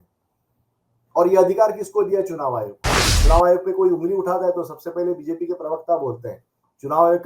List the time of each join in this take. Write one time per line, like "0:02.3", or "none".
0:03.1